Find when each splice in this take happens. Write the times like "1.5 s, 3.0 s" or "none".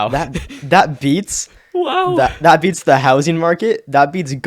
none